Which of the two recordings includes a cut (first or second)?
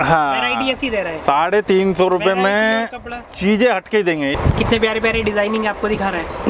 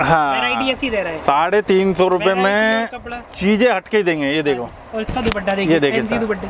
first